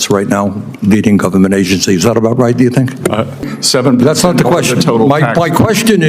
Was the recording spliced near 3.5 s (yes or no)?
yes